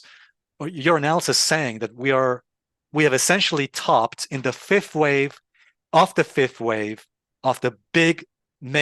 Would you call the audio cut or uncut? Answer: uncut